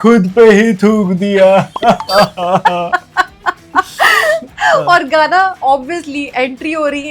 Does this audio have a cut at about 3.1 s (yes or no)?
no